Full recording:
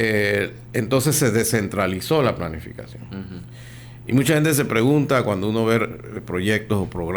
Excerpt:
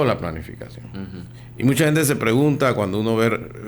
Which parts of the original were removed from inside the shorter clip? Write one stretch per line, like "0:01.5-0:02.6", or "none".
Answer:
0:03.6-0:03.9